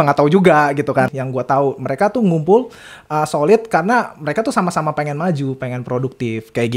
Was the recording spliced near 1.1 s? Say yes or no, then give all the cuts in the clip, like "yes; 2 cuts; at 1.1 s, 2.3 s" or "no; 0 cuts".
yes; 1 cut; at 1.1 s